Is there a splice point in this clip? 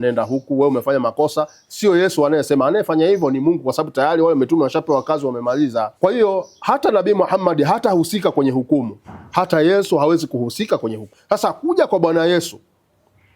yes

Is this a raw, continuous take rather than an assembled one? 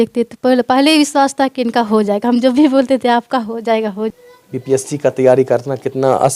no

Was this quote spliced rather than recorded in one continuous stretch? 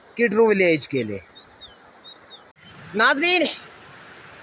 yes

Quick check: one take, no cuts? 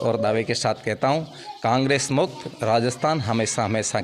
yes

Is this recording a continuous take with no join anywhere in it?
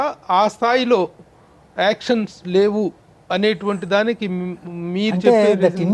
yes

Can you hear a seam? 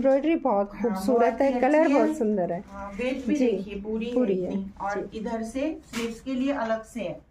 no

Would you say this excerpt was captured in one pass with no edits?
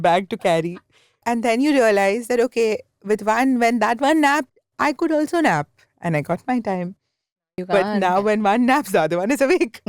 no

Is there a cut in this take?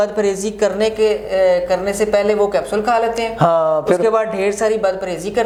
no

